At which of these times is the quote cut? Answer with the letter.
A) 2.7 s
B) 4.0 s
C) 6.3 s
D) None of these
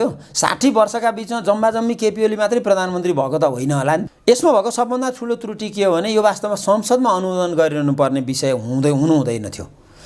B